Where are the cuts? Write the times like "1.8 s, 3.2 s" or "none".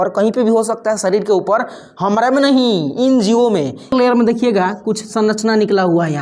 3.9 s